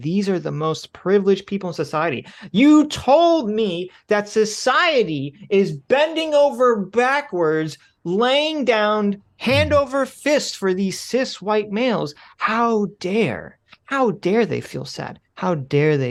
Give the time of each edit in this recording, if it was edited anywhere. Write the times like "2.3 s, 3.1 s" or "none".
none